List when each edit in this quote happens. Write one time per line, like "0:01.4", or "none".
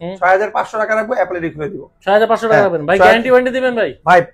none